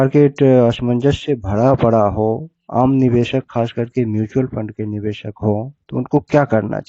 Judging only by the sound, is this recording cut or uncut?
cut